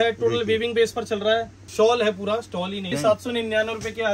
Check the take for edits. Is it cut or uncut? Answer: cut